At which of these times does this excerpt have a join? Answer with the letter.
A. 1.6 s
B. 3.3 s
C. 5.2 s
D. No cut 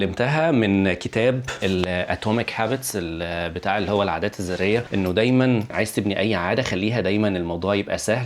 A